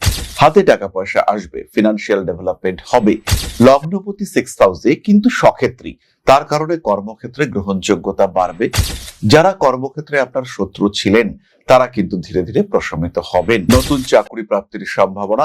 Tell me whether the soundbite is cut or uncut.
uncut